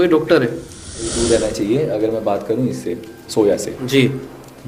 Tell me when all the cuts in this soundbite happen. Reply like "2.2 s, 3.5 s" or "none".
1.2 s